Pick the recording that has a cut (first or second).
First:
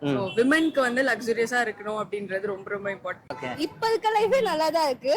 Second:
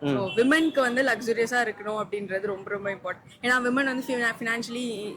first